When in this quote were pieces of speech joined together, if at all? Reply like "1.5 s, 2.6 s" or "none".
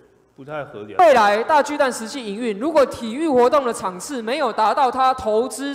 1.0 s